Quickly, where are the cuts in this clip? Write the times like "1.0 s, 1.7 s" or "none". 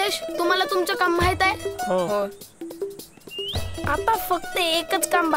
1.6 s